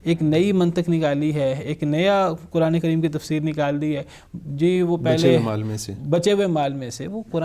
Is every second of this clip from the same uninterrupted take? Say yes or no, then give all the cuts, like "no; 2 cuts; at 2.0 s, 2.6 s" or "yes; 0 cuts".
yes; 0 cuts